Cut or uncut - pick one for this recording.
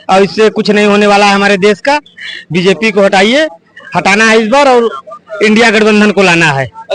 uncut